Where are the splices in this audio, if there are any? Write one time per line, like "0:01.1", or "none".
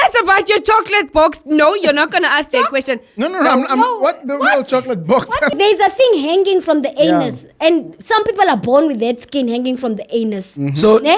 0:05.5